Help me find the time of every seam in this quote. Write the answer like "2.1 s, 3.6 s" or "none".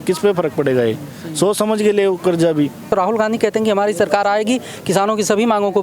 2.9 s